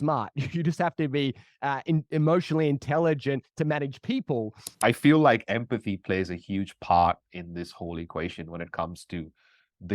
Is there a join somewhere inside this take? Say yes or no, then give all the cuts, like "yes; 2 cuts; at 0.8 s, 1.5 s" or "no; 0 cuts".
yes; 1 cut; at 4.6 s